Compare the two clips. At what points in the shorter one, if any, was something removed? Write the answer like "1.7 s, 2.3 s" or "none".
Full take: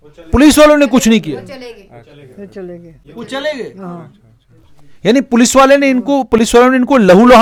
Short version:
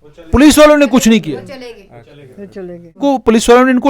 3.0 s